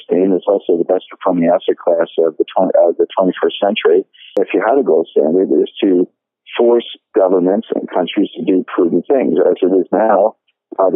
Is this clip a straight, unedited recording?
no; 1 cut; at 4.4 s

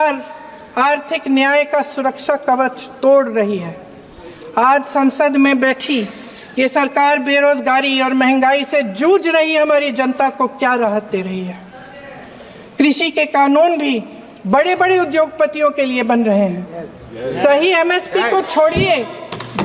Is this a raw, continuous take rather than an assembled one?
yes; 0 cuts

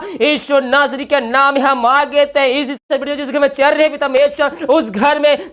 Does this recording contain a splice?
yes; 1 cut; at 2.9 s

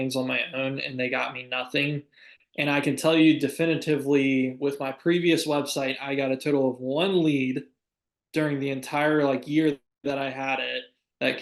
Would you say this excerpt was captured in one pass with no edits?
yes; 0 cuts

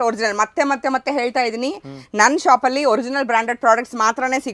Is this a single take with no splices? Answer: yes; 0 cuts

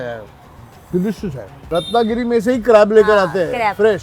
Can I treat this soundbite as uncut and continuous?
no; 1 cut; at 1.5 s

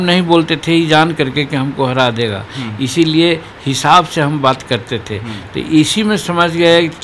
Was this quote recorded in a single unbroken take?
yes; 0 cuts

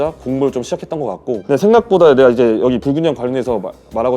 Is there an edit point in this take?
yes; 1 cut; at 1.3 s

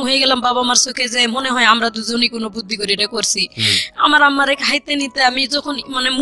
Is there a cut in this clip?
no; 0 cuts

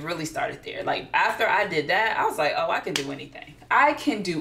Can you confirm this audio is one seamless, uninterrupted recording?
yes; 0 cuts

